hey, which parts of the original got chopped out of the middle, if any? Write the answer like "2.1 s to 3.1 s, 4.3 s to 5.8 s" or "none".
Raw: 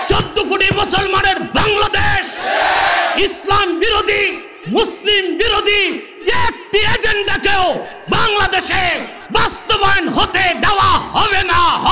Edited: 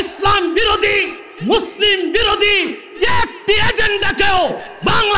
none